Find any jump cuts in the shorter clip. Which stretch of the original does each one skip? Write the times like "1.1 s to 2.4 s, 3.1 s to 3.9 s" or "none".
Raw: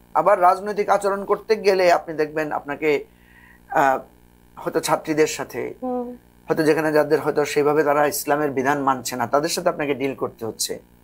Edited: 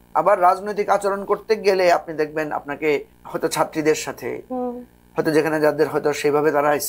3.2 s to 4.5 s